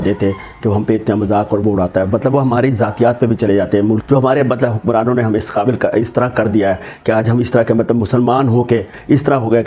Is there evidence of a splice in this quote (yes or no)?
yes